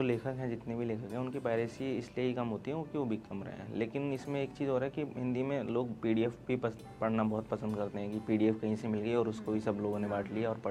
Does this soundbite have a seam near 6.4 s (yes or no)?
no